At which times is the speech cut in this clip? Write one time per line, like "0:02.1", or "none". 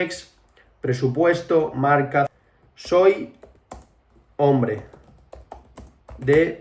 0:02.3